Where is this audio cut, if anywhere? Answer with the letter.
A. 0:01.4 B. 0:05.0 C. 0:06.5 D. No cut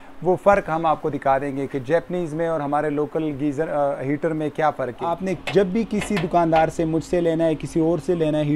B